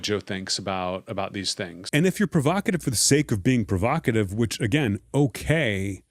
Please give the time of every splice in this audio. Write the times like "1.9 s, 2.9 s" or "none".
1.8 s